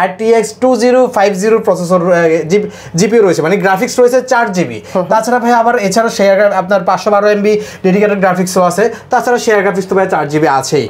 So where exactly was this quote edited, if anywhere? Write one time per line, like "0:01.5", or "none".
none